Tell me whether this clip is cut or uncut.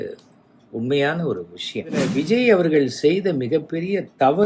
cut